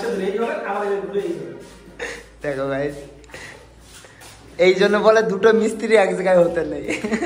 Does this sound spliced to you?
no; 0 cuts

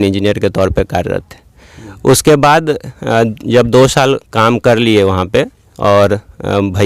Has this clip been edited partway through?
no; 0 cuts

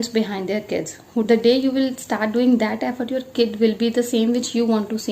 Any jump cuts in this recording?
yes; 1 cut; at 1.3 s

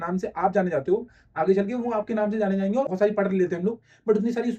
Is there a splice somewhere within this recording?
yes; 1 cut; at 2.9 s

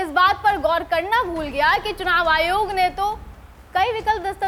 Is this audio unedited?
yes; 0 cuts

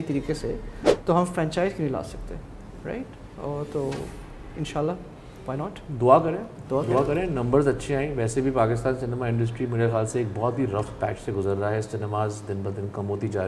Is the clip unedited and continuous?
yes; 0 cuts

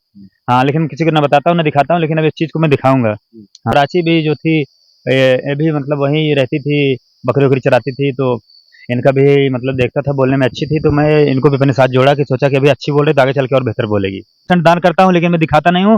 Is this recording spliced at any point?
yes; 2 cuts; at 3.6 s, 14.4 s

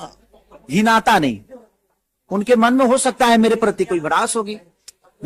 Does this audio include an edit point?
no; 0 cuts

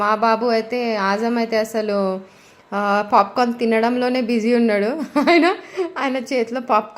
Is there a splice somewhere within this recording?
no; 0 cuts

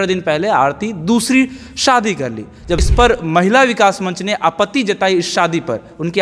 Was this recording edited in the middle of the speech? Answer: yes; 1 cut; at 2.8 s

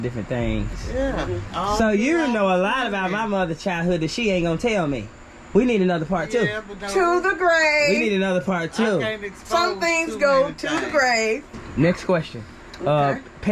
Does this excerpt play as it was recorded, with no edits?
no; 1 cut; at 11.5 s

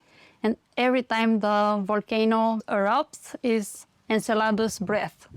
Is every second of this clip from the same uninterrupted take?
yes; 0 cuts

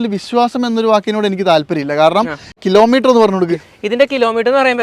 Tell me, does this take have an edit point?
yes; 1 cut; at 2.6 s

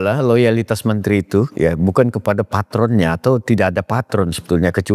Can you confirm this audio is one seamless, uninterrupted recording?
yes; 0 cuts

